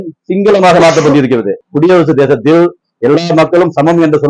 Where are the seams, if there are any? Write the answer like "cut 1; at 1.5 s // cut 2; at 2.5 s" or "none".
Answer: cut 1; at 1.6 s